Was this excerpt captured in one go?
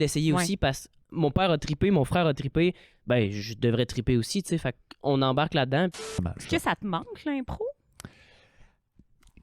no; 1 cut; at 6.2 s

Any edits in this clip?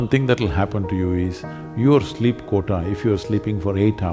no; 0 cuts

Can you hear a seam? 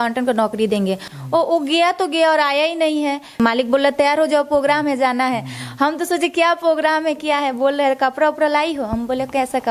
yes; 2 cuts; at 1.1 s, 3.4 s

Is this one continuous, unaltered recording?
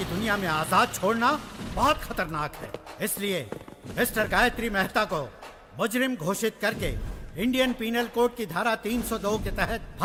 yes; 0 cuts

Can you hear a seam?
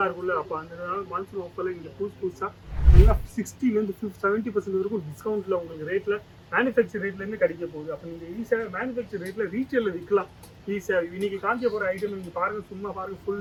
no; 0 cuts

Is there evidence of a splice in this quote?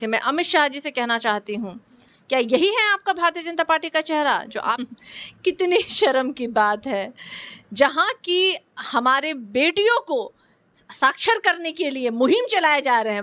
yes; 1 cut; at 4.8 s

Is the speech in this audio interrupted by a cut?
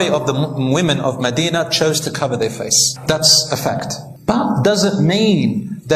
no; 0 cuts

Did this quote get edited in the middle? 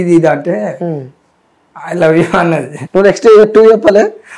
yes; 1 cut; at 2.8 s

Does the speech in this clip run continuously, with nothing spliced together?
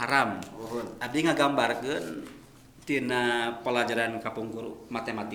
yes; 0 cuts

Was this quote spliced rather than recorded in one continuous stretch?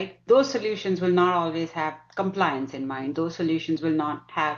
no; 0 cuts

